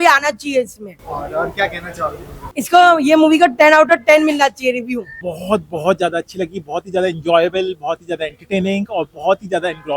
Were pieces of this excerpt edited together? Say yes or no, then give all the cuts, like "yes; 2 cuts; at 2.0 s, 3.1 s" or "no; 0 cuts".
no; 0 cuts